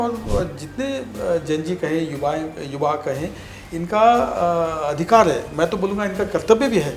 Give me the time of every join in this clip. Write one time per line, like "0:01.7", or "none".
none

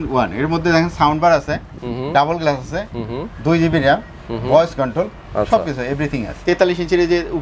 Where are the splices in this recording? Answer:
0:06.3

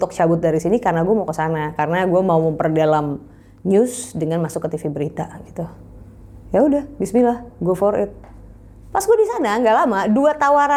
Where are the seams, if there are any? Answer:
none

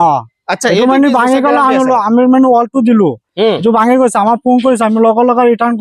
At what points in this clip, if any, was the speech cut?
none

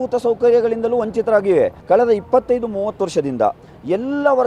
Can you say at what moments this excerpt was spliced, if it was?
0:01.8

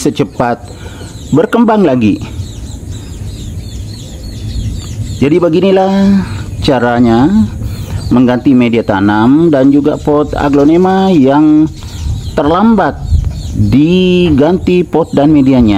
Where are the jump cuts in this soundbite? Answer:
none

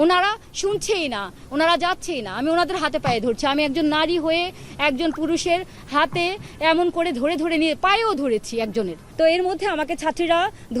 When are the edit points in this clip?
0:09.0

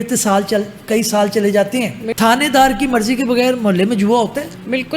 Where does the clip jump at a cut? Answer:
0:02.0

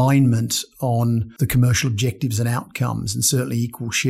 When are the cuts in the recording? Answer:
0:01.3

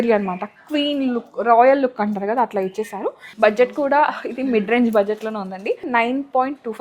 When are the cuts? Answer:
0:03.2
0:05.8

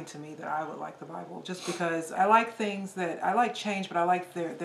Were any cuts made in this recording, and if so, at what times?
0:02.1

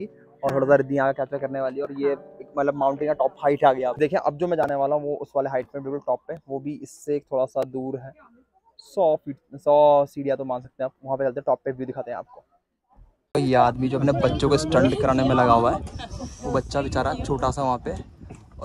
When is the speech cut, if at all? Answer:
0:03.9
0:13.1

